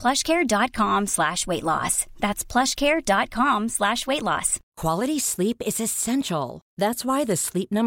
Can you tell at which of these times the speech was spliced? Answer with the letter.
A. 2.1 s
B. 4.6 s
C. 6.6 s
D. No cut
B